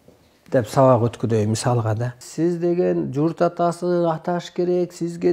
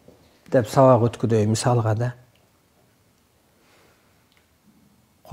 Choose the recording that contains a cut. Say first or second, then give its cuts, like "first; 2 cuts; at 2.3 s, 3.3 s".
first; 1 cut; at 2.2 s